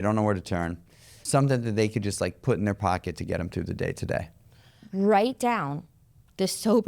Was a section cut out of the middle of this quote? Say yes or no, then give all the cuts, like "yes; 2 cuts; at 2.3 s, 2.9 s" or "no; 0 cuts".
yes; 2 cuts; at 1.1 s, 4.8 s